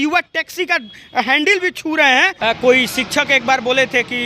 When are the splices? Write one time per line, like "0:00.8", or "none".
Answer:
0:02.3